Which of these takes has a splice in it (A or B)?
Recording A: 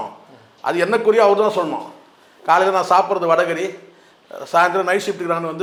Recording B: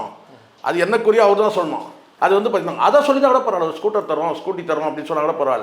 B